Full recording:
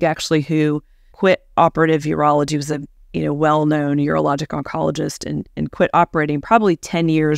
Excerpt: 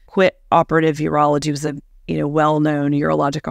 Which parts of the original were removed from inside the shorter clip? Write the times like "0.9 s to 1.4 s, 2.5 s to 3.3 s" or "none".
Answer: none